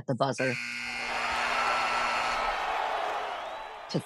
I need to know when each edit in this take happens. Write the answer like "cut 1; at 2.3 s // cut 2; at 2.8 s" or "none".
none